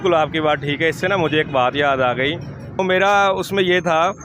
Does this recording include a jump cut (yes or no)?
yes